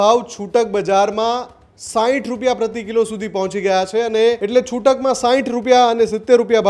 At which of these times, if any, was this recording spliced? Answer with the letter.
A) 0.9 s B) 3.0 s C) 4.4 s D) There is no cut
C